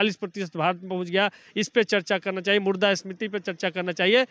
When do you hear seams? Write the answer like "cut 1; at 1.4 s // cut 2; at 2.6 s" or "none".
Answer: none